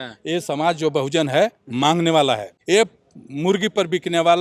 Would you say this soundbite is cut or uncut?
cut